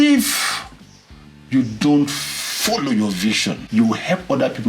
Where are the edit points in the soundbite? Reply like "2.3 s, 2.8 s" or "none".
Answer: 3.7 s